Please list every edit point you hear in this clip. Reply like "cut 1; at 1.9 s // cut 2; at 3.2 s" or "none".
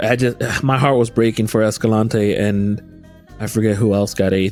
none